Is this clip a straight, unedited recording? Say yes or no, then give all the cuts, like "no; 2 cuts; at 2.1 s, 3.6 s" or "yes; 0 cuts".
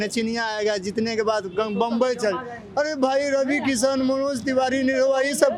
yes; 0 cuts